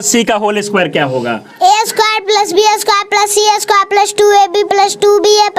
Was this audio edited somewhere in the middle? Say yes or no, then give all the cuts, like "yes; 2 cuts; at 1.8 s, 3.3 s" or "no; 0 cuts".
no; 0 cuts